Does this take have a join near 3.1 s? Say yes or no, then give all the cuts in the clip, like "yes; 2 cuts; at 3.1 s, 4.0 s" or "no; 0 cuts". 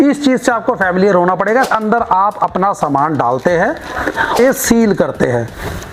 no; 2 cuts; at 1.7 s, 4.4 s